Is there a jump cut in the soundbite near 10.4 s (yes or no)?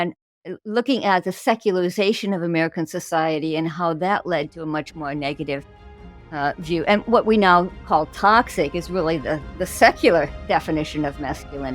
yes